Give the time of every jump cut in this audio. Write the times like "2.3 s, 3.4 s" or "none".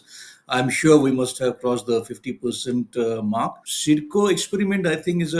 3.7 s